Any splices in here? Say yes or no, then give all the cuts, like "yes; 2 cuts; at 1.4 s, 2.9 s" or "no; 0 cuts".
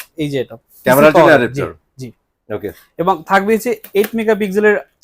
no; 0 cuts